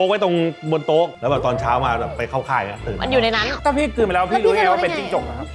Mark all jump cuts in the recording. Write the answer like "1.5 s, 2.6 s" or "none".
1.1 s, 3.5 s